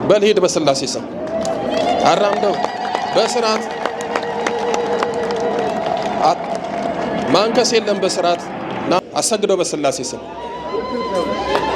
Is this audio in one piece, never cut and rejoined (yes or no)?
no